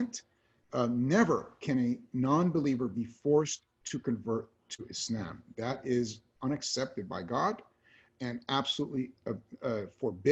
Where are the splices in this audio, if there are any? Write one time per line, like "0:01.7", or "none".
none